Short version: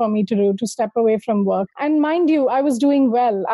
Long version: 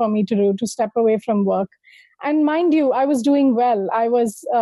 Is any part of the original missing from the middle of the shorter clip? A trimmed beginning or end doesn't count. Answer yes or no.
yes